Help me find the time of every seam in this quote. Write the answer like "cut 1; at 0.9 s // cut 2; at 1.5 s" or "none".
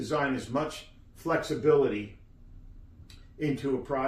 none